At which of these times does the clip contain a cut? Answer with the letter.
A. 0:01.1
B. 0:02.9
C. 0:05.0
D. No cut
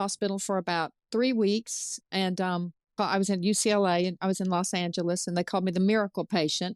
B